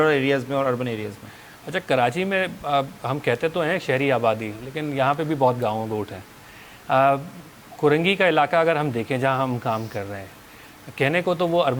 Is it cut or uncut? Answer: uncut